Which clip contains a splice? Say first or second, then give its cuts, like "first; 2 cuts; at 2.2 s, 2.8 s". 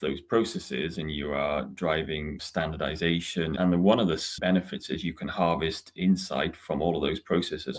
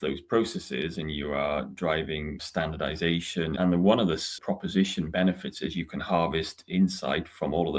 first; 1 cut; at 4.3 s